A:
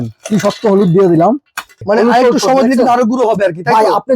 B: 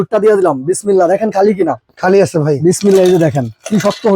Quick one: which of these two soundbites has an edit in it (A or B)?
A